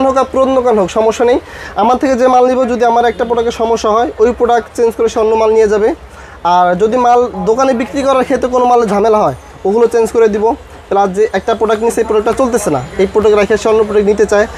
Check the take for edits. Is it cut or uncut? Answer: uncut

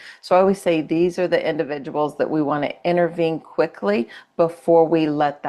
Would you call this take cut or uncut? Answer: uncut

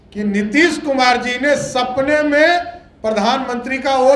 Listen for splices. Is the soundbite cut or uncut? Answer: uncut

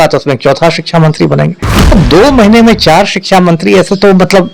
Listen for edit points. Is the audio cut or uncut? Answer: uncut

